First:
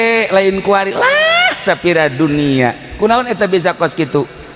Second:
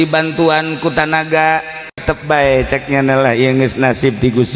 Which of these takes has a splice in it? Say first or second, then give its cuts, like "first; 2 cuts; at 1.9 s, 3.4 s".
second; 1 cut; at 2.0 s